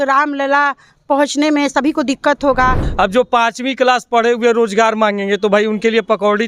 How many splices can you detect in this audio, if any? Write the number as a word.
one